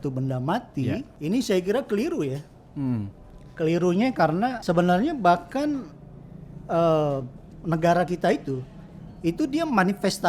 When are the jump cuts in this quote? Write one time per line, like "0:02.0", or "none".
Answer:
0:01.1
0:04.6